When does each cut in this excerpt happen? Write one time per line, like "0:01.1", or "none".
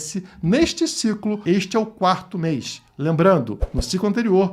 0:01.4